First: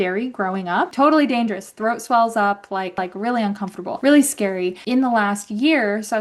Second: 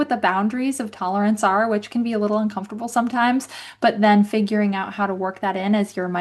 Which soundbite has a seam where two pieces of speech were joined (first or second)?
first